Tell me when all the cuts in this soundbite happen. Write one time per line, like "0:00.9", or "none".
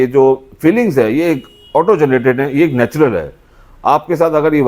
none